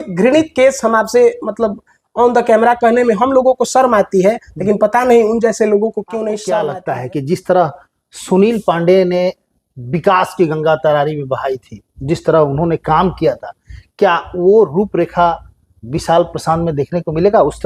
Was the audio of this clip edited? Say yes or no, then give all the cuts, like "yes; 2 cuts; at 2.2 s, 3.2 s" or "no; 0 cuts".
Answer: yes; 1 cut; at 6.7 s